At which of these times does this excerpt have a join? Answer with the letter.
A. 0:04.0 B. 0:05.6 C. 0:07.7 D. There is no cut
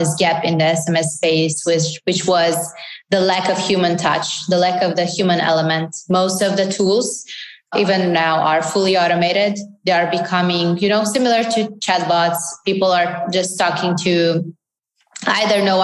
C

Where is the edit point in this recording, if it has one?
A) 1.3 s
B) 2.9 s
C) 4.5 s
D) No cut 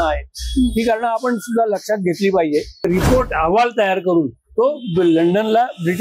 B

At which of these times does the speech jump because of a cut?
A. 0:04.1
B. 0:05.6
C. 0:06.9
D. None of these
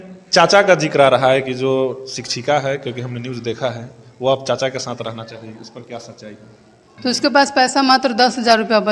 C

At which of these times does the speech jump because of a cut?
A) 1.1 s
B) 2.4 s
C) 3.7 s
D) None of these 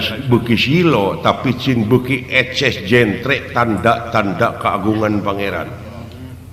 D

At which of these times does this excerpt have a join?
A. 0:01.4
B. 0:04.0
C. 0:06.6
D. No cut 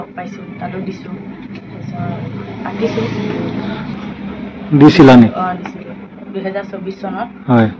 B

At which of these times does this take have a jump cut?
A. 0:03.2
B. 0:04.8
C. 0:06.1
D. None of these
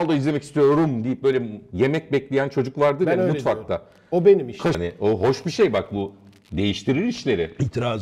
B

